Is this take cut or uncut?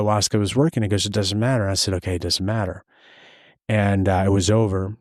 uncut